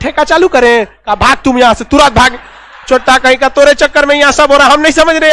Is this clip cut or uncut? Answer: uncut